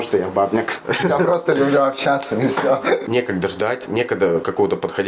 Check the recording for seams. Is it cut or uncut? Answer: cut